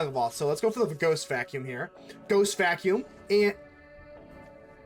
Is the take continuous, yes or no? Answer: yes